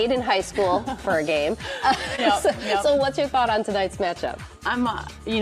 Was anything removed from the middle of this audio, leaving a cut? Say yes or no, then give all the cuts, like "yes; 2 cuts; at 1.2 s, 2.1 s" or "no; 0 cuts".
no; 0 cuts